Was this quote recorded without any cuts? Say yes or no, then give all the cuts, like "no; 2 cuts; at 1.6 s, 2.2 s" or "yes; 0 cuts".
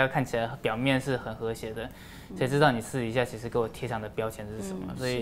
yes; 0 cuts